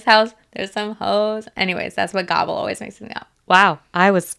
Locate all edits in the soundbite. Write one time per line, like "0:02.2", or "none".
none